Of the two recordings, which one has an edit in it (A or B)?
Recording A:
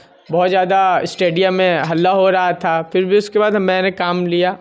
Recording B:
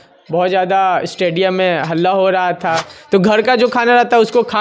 B